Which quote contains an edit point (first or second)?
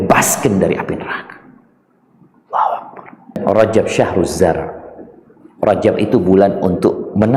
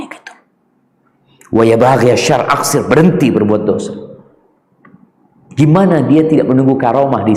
first